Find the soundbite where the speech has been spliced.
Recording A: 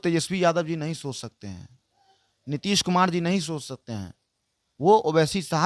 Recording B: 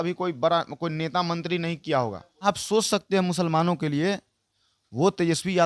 B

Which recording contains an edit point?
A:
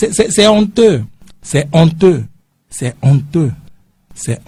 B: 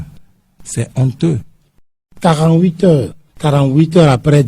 B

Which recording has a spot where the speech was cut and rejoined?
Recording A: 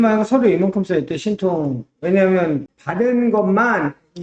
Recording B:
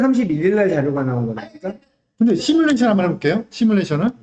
A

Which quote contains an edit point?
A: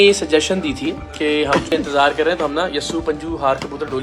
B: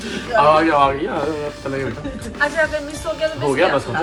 A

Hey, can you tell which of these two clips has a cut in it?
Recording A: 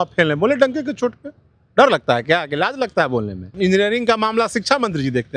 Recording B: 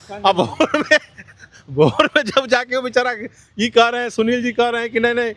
A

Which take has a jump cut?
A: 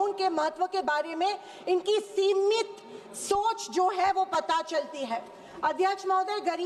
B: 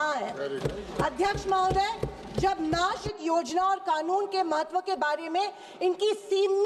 B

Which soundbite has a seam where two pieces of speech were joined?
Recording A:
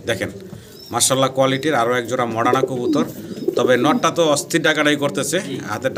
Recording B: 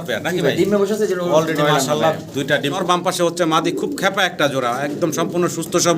B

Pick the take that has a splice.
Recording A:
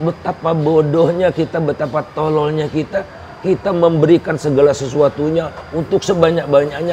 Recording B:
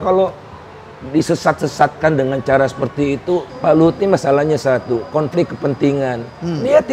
B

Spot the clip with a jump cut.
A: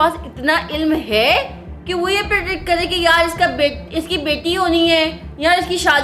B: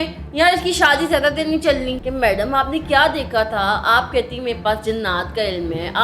B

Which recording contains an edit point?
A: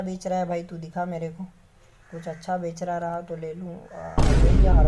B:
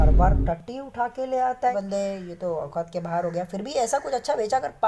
B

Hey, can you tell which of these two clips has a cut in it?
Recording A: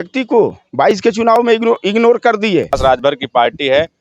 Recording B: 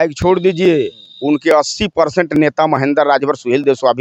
A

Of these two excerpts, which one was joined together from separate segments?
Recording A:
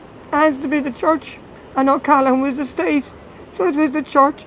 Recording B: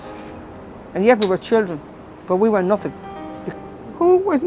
B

